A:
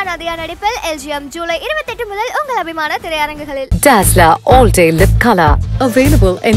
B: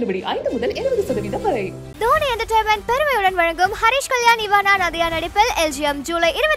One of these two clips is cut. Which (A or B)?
B